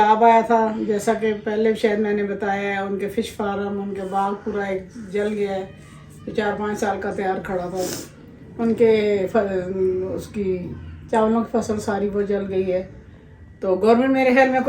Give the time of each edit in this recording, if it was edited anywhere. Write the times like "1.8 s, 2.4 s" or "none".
none